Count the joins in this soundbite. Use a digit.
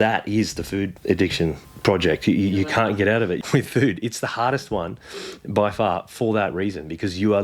3